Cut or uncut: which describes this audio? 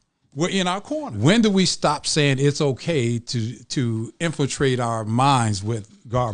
cut